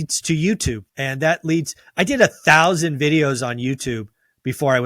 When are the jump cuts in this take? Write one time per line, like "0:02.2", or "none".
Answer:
0:00.9